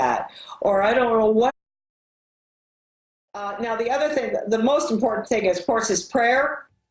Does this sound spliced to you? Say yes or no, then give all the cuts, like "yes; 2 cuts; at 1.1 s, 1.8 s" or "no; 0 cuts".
no; 0 cuts